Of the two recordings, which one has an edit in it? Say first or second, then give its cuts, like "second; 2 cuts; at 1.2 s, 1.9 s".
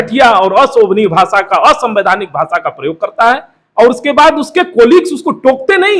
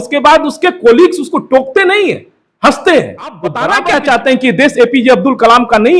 second; 1 cut; at 3.6 s